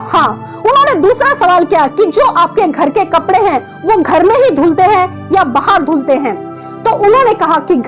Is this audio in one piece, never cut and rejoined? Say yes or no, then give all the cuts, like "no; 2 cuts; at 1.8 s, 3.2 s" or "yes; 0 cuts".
yes; 0 cuts